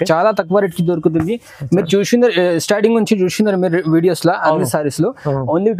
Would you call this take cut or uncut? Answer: uncut